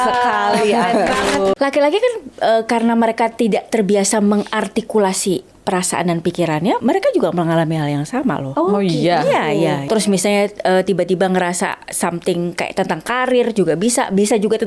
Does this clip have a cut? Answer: yes; 4 cuts; at 1.5 s, 6.8 s, 8.5 s, 9.8 s

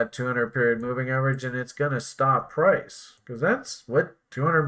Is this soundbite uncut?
yes; 0 cuts

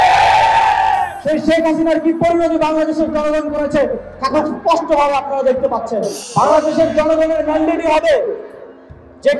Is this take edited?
yes; 1 cut; at 6.2 s

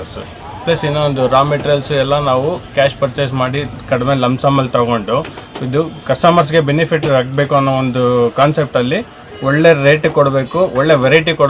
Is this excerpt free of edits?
yes; 0 cuts

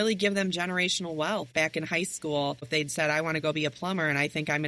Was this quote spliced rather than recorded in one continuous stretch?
yes; 2 cuts; at 1.5 s, 2.7 s

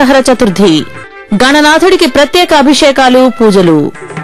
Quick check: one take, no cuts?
yes; 0 cuts

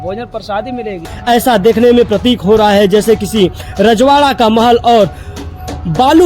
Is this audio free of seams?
no; 1 cut; at 1.1 s

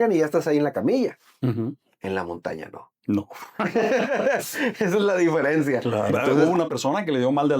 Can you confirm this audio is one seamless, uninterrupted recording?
no; 1 cut; at 6.3 s

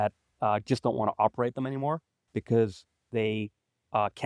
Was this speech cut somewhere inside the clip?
yes; 1 cut; at 2.4 s

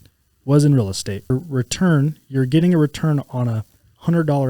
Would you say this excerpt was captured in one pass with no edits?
no; 1 cut; at 1.3 s

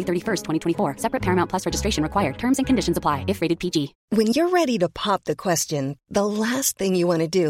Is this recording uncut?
no; 1 cut; at 4.0 s

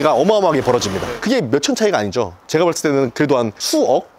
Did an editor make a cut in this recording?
no; 0 cuts

